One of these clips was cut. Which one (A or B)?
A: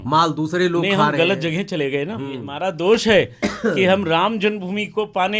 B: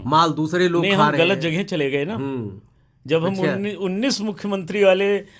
A